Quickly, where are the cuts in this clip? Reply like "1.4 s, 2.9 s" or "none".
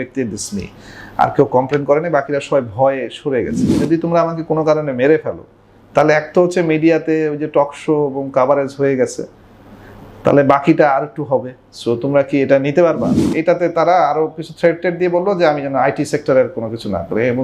3.7 s, 13.2 s